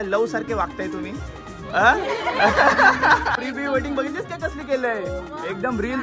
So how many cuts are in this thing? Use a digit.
1